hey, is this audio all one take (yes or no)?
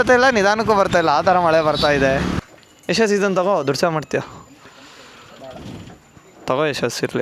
no